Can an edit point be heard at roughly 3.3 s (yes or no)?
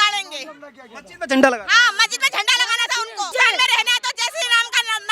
yes